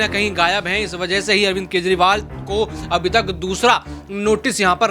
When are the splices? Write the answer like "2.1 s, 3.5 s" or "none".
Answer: none